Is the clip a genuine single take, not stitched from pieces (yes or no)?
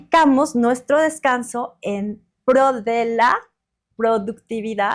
yes